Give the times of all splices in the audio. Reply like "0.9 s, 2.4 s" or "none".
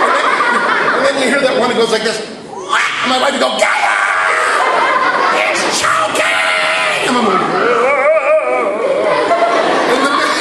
none